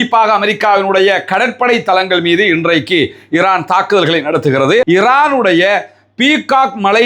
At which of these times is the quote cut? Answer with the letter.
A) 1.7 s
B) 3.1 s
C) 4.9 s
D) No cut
C